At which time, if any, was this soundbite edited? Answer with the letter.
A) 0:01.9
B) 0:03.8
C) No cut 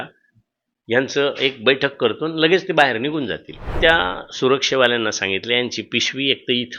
B